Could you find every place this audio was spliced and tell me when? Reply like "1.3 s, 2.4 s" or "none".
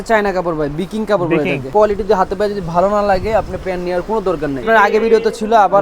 1.7 s, 4.6 s